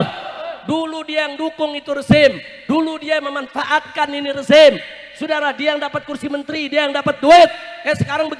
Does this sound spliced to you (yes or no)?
no